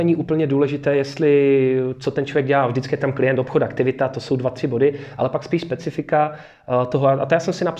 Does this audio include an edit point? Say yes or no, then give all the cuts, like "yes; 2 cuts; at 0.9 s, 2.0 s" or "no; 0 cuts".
no; 0 cuts